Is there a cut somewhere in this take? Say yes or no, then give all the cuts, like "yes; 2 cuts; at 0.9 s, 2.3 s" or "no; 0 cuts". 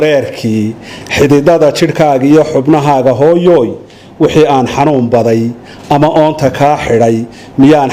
no; 0 cuts